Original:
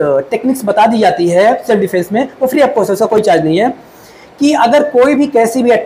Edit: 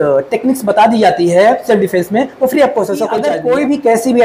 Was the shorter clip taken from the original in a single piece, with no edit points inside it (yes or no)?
no